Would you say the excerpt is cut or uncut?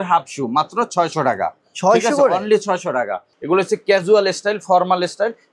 cut